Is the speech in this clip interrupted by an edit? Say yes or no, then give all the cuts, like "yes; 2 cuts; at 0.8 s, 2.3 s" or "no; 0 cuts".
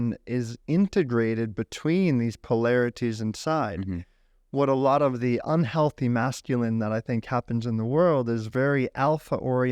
no; 0 cuts